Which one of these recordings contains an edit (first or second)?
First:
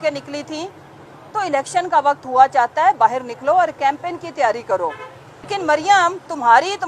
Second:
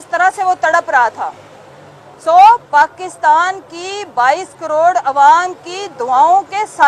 first